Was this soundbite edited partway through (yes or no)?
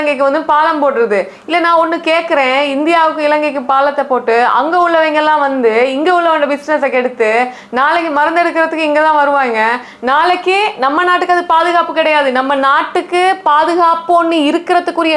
no